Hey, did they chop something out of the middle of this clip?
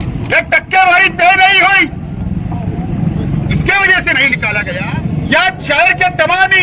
yes; 1 cut; at 4.6 s

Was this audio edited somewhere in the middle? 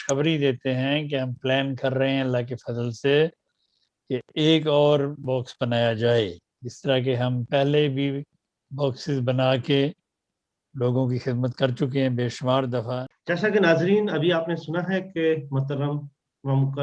yes; 1 cut; at 13.1 s

